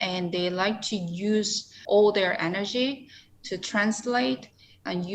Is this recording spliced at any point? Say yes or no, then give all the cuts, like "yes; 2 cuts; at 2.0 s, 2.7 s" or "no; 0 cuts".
yes; 1 cut; at 1.7 s